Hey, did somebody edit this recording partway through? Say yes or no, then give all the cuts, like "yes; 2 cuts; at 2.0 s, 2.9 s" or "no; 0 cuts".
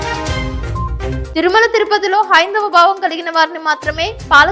yes; 1 cut; at 0.9 s